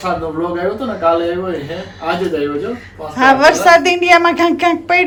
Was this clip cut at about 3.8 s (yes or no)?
no